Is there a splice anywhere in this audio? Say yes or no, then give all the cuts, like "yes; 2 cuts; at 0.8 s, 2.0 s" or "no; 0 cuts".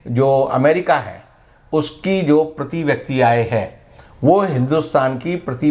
no; 0 cuts